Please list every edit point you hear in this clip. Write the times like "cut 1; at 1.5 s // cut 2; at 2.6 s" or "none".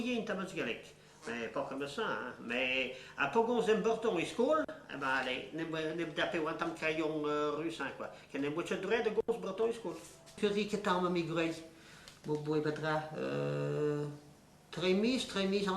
cut 1; at 10.3 s